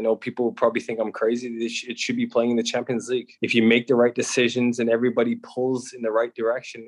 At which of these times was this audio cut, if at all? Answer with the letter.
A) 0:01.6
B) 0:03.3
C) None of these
B